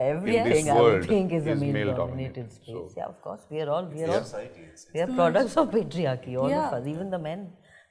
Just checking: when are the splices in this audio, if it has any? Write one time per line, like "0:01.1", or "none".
none